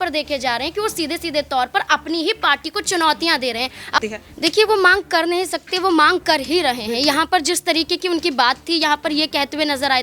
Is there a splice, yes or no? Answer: yes